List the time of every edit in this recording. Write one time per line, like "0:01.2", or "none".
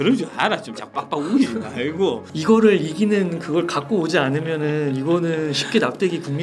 0:02.3